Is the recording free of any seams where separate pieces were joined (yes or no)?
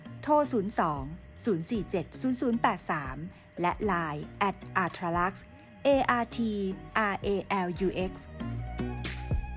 no